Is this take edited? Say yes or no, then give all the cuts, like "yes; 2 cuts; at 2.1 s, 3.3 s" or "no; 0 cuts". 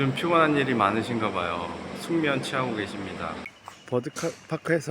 yes; 1 cut; at 3.5 s